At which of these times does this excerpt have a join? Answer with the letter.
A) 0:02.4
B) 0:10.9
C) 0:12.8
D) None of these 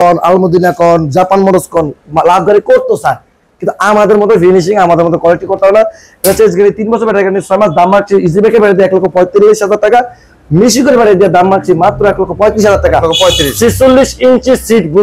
D